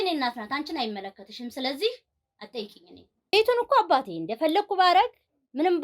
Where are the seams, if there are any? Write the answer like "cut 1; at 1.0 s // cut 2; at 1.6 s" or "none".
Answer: cut 1; at 3.3 s